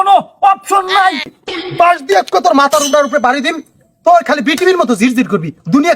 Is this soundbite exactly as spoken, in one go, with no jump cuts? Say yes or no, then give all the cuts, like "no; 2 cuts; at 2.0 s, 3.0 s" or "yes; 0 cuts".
no; 1 cut; at 1.4 s